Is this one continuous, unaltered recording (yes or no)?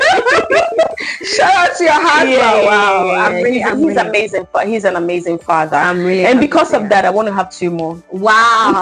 yes